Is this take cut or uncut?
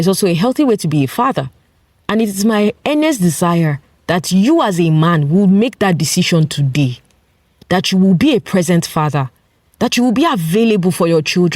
uncut